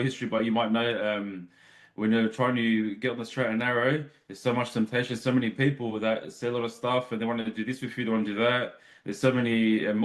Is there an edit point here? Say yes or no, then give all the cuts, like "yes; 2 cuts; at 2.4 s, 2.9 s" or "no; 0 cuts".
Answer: no; 0 cuts